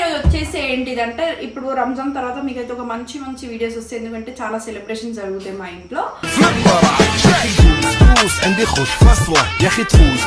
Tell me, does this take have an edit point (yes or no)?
no